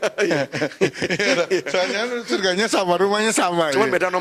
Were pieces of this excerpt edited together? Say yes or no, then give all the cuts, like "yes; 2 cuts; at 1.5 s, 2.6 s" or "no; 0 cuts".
no; 0 cuts